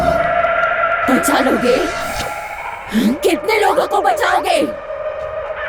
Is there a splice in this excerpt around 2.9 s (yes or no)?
no